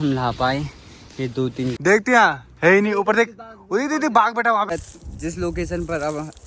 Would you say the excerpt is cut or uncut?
cut